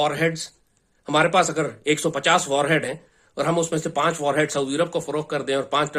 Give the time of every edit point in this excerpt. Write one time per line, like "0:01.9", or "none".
none